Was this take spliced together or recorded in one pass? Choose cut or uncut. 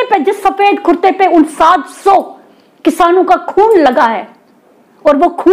uncut